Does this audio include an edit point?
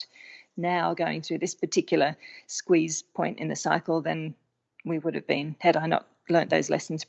no; 0 cuts

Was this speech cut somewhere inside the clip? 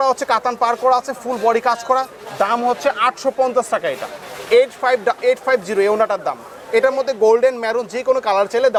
no; 0 cuts

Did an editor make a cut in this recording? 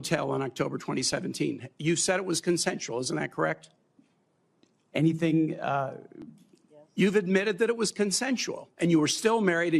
no; 0 cuts

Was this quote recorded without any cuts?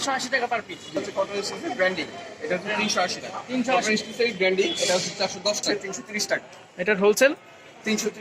no; 3 cuts; at 1.0 s, 3.9 s, 5.8 s

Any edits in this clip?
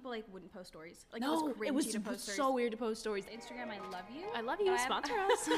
yes; 1 cut; at 3.2 s

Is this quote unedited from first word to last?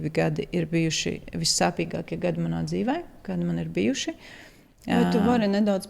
yes; 0 cuts

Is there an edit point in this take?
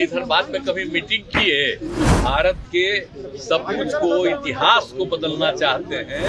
yes; 1 cut; at 2.1 s

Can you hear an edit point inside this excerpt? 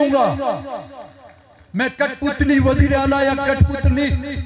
no; 0 cuts

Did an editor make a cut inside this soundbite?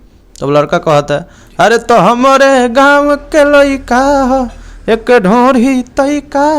no; 0 cuts

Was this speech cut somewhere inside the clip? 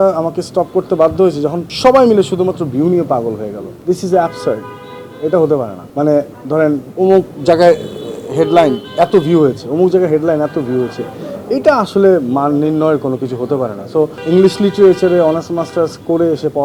yes; 5 cuts; at 1.7 s, 3.7 s, 5.8 s, 6.9 s, 14.2 s

